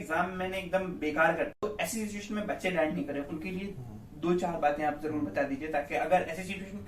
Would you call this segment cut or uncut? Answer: cut